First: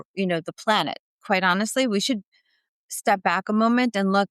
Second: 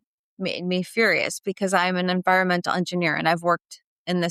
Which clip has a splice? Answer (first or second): first